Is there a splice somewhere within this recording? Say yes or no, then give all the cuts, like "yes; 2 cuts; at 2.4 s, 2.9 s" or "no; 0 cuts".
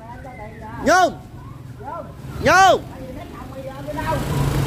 no; 0 cuts